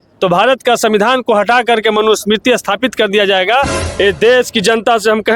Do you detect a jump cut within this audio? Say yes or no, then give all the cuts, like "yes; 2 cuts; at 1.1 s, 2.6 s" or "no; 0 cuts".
yes; 1 cut; at 3.8 s